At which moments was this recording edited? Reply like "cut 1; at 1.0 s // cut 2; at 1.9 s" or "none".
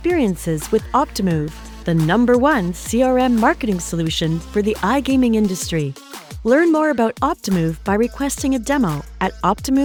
none